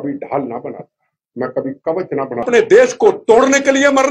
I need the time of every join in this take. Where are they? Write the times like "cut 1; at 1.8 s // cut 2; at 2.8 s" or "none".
cut 1; at 2.4 s

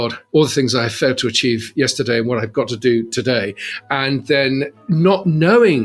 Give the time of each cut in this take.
none

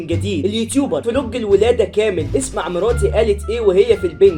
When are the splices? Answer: none

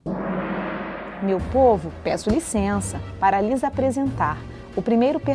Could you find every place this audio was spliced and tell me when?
cut 1; at 1.1 s

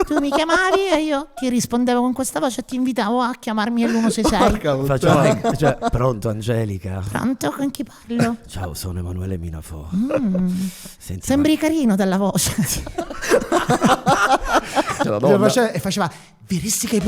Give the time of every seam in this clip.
cut 1; at 15.0 s

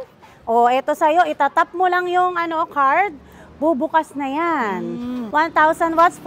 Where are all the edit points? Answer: cut 1; at 5.2 s

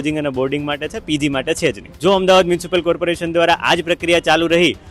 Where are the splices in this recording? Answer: cut 1; at 1.9 s

